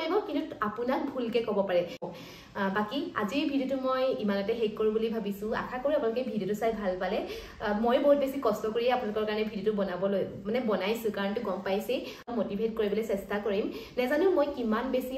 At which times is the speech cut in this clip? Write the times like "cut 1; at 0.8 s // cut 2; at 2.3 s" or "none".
cut 1; at 2.0 s // cut 2; at 12.3 s